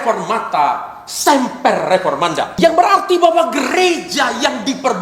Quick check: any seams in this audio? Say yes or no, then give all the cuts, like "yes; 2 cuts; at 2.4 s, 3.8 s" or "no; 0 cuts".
yes; 1 cut; at 2.6 s